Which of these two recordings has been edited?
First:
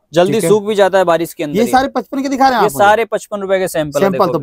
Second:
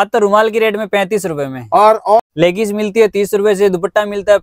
second; 1 cut; at 2.3 s

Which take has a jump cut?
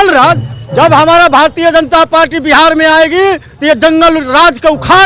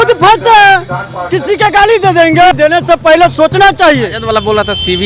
second; 2 cuts; at 2.5 s, 4.2 s

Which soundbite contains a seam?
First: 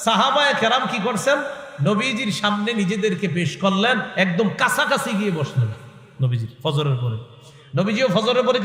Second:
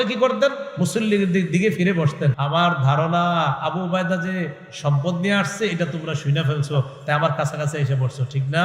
second; 1 cut; at 2.4 s

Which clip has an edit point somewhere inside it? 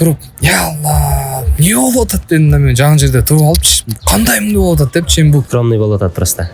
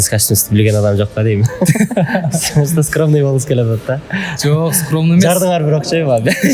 first; 1 cut; at 5.5 s

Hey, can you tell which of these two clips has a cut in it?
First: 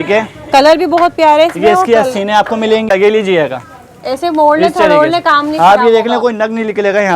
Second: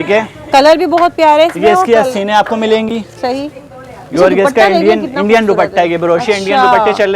first; 1 cut; at 2.9 s

